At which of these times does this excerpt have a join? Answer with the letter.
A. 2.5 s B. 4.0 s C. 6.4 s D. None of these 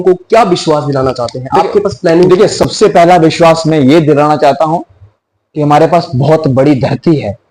D